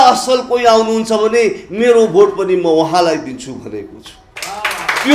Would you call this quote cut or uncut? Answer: uncut